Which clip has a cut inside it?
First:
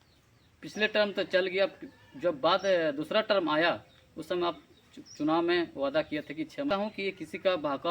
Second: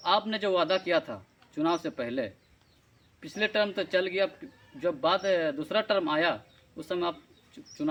first; 1 cut; at 6.7 s

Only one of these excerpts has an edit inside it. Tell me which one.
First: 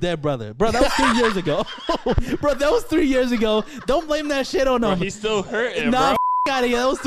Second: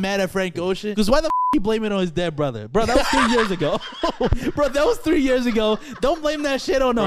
second; 1 cut; at 0.9 s

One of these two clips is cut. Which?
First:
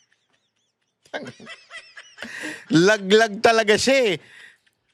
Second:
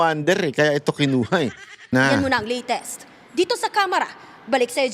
second; 1 cut; at 1.7 s

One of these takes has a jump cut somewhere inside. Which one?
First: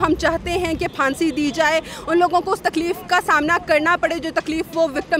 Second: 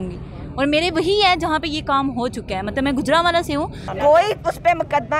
second; 1 cut; at 3.8 s

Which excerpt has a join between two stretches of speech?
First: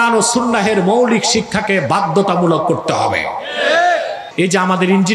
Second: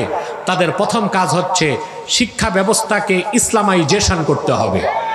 first; 1 cut; at 4.2 s

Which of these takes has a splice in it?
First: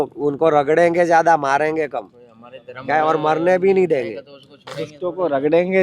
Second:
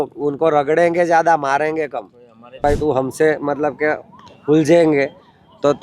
second; 1 cut; at 2.6 s

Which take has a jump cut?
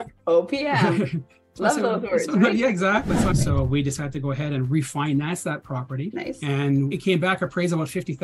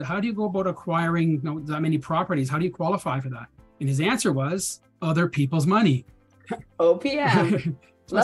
first; 3 cuts; at 3.3 s, 6.1 s, 6.9 s

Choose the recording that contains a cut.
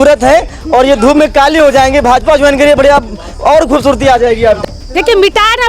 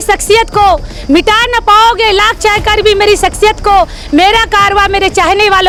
first; 1 cut; at 4.6 s

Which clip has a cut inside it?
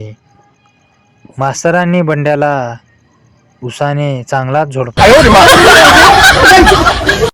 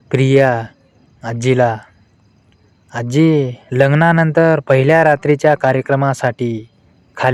first; 1 cut; at 4.9 s

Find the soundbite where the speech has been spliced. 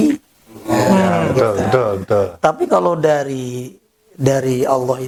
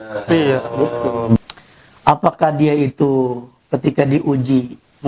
second; 1 cut; at 1.4 s

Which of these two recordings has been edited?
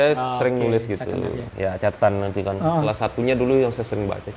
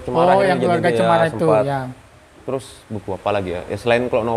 first; 1 cut; at 2.8 s

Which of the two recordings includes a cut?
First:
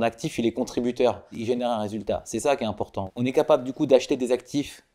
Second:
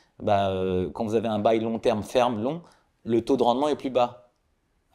first; 2 cuts; at 1.3 s, 2.9 s

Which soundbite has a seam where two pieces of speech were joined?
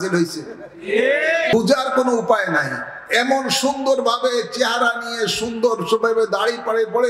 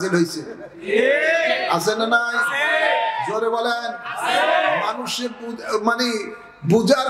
first; 1 cut; at 1.5 s

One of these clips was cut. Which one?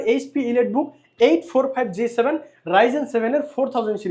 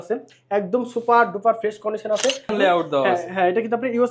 second; 1 cut; at 2.5 s

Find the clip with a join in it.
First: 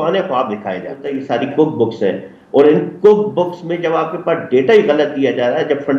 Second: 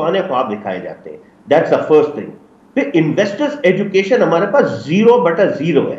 first; 1 cut; at 1.1 s

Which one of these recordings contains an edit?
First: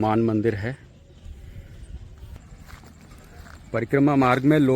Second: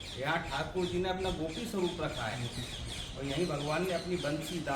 first; 1 cut; at 2.5 s

